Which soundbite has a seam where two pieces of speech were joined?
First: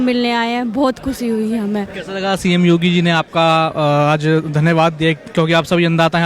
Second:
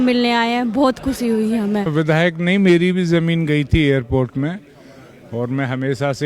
second; 1 cut; at 1.9 s

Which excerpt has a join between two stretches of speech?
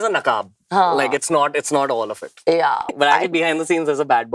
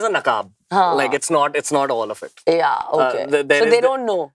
first; 1 cut; at 2.9 s

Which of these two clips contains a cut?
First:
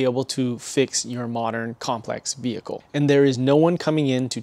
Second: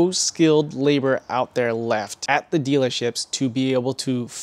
first; 1 cut; at 2.8 s

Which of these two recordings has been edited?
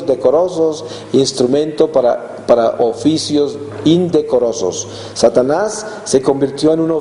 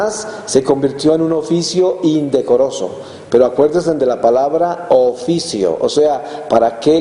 first; 1 cut; at 3.9 s

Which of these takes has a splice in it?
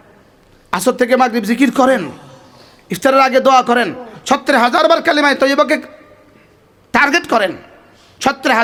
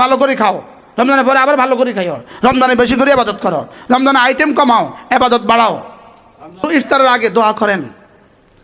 second; 1 cut; at 6.7 s

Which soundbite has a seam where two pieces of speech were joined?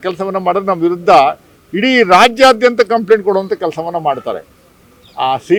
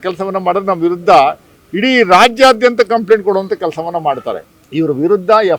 second; 1 cut; at 4.5 s

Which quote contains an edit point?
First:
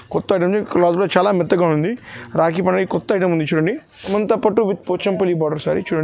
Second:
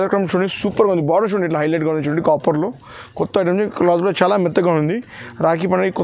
first; 1 cut; at 4.0 s

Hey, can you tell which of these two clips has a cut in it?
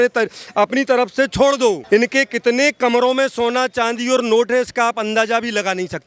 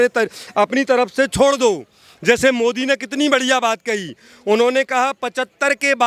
first; 1 cut; at 1.8 s

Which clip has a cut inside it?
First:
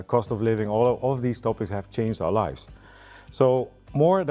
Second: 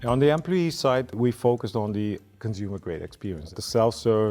second; 1 cut; at 1.1 s

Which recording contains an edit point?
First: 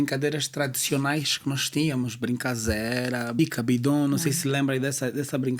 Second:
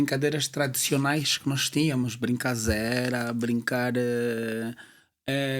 first; 1 cut; at 3.4 s

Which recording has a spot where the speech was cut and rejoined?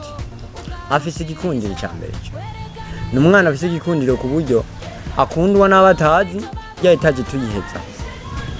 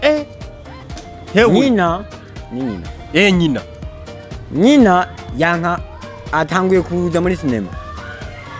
first; 1 cut; at 6.7 s

